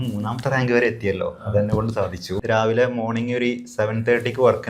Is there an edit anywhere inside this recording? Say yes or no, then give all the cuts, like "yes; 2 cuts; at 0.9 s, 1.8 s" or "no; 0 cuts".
yes; 1 cut; at 2.4 s